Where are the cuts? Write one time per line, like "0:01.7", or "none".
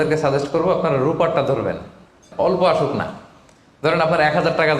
0:02.3